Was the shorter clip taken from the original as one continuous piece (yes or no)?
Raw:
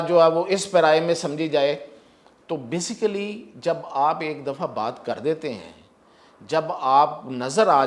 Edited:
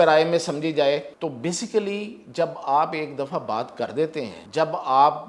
no